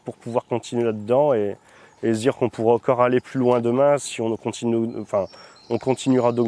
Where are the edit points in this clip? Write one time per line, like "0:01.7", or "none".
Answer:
none